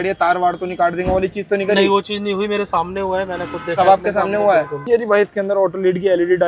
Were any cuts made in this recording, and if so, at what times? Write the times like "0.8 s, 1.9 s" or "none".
4.8 s